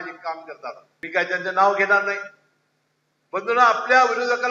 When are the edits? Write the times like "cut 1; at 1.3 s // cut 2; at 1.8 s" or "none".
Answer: none